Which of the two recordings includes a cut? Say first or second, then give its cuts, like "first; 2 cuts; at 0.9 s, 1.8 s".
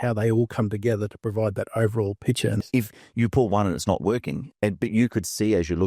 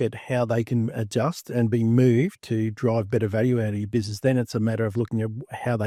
first; 1 cut; at 2.6 s